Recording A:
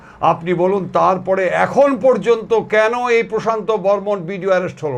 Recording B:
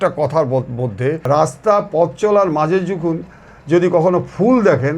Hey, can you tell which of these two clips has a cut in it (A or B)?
B